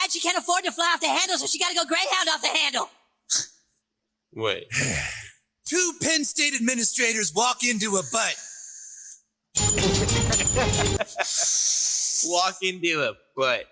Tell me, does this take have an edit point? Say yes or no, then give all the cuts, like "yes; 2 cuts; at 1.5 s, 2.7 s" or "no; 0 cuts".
no; 0 cuts